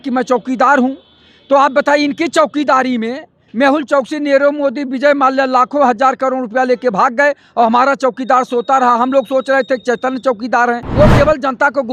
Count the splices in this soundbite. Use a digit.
1